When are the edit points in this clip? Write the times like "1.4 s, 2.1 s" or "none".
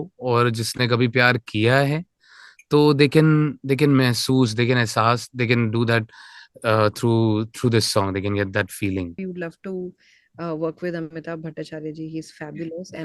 9.2 s